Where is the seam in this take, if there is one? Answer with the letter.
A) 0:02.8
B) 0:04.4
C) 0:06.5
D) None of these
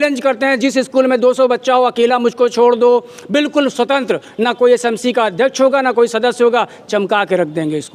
D